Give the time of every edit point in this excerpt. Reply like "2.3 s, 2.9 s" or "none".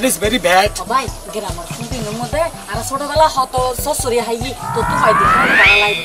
none

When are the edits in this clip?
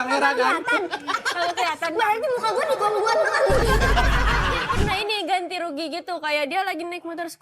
4.8 s

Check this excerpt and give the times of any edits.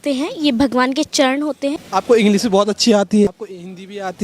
1.8 s, 3.3 s

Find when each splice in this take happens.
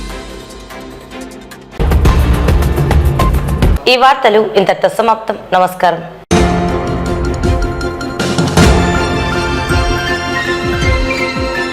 none

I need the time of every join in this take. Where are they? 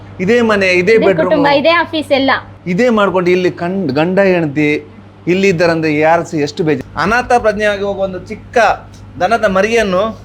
6.8 s

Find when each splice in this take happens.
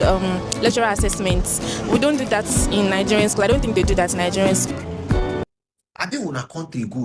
5.4 s

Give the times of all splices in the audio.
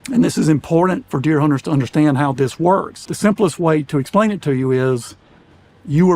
3.0 s

